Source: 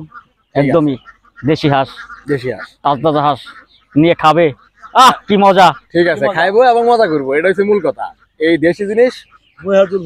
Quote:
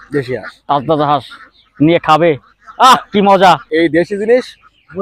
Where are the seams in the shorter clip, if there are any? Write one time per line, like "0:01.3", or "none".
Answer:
0:03.7